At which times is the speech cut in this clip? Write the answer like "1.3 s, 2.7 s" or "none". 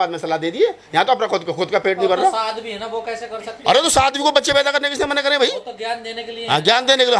none